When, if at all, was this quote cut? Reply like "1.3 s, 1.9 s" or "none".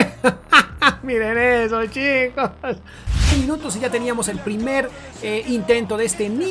3.3 s